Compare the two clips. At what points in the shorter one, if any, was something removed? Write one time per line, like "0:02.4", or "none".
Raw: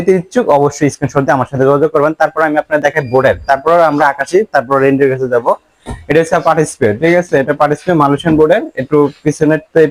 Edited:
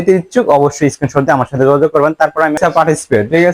0:02.6